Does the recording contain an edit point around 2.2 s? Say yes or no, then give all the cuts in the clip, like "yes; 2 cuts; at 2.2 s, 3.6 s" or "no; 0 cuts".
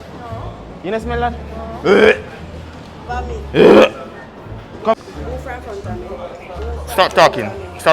no; 1 cut; at 5.0 s